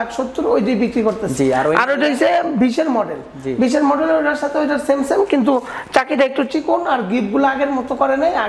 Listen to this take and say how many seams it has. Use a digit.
0